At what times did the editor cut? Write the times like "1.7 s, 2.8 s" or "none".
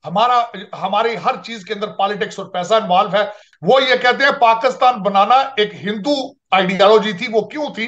3.4 s

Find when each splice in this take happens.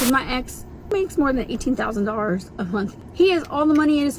0.9 s, 2.9 s

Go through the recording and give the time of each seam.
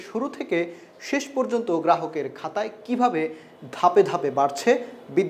none

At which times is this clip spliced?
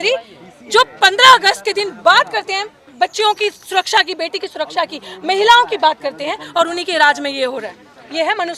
none

